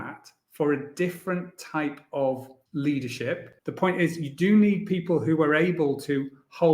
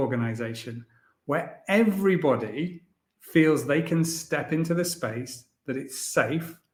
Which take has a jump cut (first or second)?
first